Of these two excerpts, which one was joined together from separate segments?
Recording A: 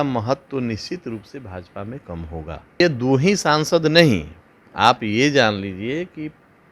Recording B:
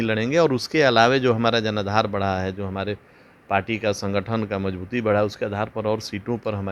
A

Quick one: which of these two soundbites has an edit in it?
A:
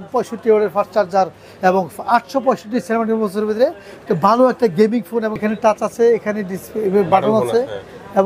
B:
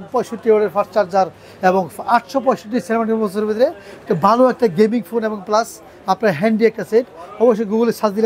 A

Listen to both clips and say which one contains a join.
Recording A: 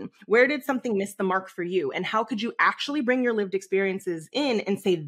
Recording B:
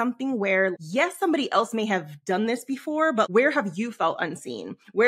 B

